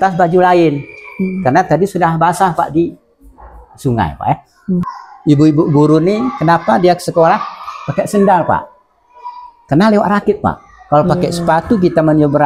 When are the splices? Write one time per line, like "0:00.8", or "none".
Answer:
0:05.0